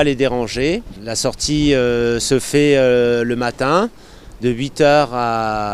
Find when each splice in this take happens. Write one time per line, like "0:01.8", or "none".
0:02.2

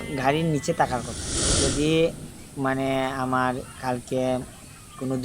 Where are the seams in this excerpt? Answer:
0:01.6

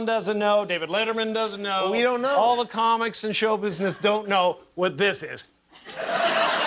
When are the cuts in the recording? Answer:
none

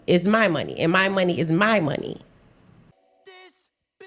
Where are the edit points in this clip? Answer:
0:02.9

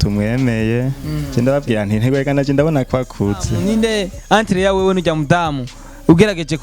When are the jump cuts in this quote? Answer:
0:01.1
0:03.5

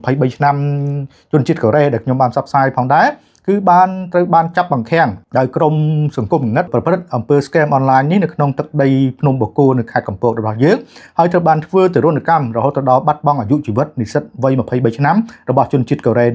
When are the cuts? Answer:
0:05.2
0:06.7

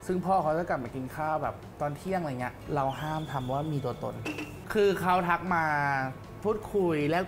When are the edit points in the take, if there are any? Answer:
0:04.6

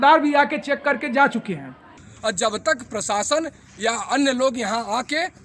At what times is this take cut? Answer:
0:02.1

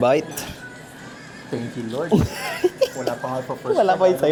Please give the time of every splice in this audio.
none

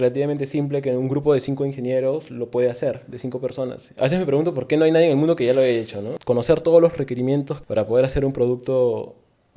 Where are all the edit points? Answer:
0:03.8
0:06.1
0:07.6

